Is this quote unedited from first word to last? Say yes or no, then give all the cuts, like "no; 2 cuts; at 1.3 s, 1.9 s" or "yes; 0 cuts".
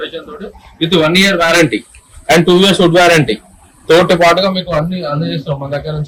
yes; 0 cuts